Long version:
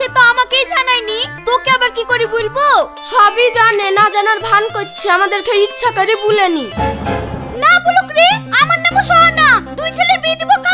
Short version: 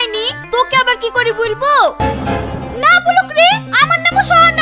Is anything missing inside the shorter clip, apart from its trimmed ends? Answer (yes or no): yes